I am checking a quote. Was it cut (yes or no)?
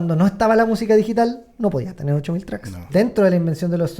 yes